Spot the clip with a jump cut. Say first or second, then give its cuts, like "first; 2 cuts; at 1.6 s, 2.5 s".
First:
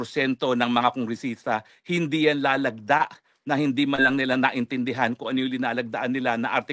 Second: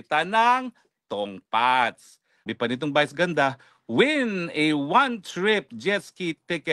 second; 1 cut; at 2.5 s